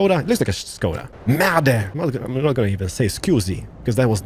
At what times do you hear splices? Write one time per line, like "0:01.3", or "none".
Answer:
0:01.1
0:01.9